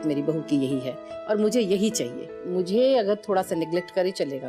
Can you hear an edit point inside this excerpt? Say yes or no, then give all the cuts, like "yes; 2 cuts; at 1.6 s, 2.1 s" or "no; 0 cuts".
yes; 1 cut; at 2.4 s